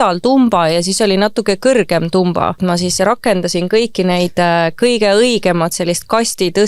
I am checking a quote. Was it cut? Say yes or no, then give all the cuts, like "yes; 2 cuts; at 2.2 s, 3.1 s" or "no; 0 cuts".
yes; 1 cut; at 2.6 s